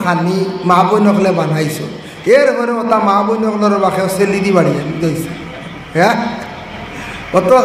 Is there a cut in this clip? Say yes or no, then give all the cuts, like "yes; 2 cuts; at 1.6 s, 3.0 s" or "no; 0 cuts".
no; 0 cuts